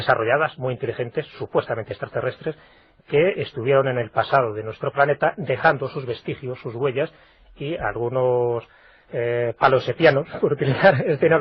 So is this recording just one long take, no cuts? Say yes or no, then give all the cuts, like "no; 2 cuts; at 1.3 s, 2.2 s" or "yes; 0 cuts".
yes; 0 cuts